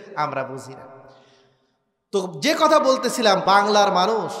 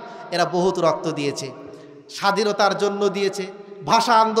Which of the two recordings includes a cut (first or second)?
first